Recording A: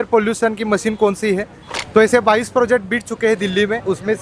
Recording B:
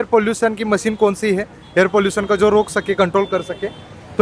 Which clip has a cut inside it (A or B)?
A